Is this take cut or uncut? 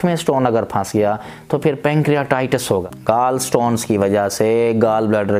cut